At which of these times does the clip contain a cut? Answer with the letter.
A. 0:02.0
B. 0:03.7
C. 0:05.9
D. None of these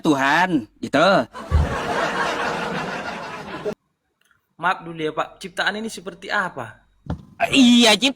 B